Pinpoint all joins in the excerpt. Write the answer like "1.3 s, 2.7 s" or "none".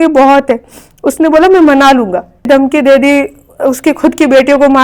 2.5 s